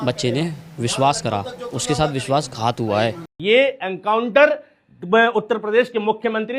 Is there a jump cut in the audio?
yes; 1 cut; at 3.3 s

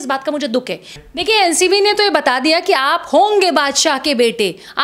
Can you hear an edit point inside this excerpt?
yes; 1 cut; at 1.0 s

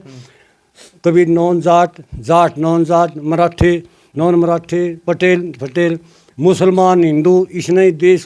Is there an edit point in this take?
no; 0 cuts

